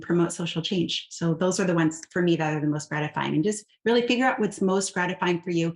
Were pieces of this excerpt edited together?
no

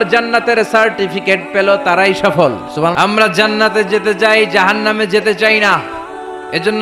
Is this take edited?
yes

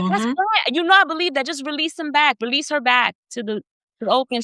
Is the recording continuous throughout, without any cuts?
yes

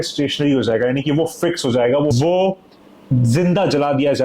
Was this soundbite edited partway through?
yes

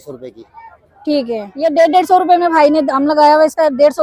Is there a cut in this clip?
yes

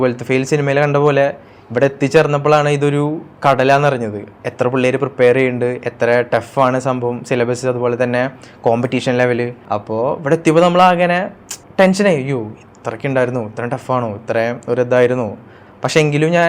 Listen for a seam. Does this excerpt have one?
no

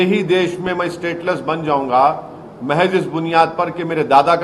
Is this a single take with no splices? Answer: yes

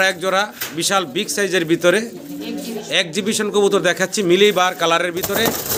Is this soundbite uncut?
yes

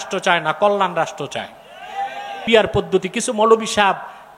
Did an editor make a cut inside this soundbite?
yes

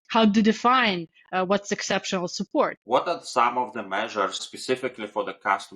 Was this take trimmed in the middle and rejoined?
yes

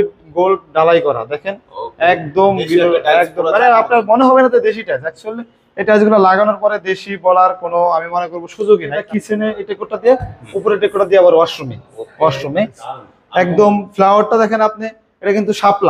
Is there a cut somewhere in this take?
yes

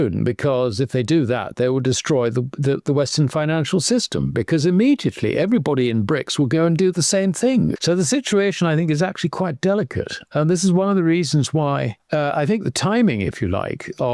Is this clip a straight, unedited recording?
no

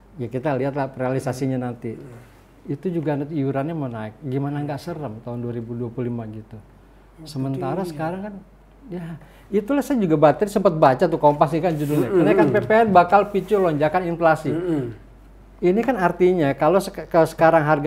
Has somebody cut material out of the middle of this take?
no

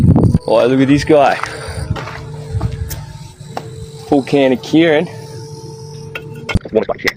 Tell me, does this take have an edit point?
no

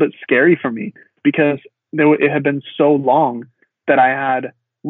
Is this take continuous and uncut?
yes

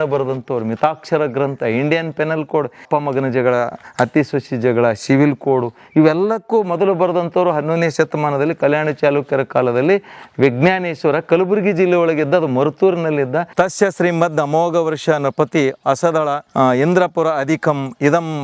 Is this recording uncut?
no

